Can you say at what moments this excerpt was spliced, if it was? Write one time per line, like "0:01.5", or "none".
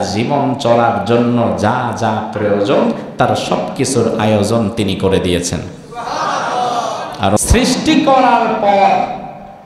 0:07.4